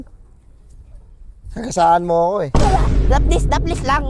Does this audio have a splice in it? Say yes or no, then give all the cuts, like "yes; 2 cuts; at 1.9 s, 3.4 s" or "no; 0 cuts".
no; 0 cuts